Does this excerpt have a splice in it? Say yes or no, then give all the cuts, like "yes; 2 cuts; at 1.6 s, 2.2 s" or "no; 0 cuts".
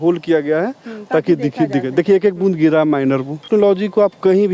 yes; 1 cut; at 3.5 s